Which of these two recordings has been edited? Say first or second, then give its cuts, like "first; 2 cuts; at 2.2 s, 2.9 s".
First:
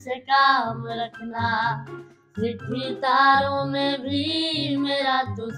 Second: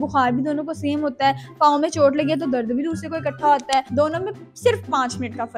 second; 1 cut; at 3.9 s